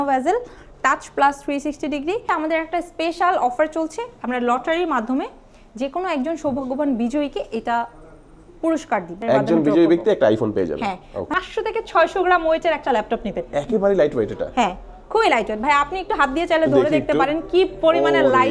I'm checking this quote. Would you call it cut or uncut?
cut